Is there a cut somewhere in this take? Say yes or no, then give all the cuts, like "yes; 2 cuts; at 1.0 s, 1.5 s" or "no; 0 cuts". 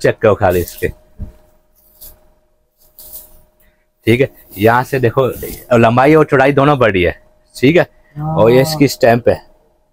no; 0 cuts